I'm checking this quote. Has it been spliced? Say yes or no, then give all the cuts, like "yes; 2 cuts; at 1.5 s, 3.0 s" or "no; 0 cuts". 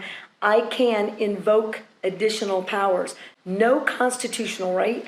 yes; 1 cut; at 3.3 s